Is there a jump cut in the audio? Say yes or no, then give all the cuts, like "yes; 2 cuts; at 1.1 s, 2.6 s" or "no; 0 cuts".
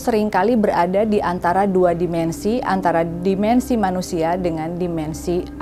no; 0 cuts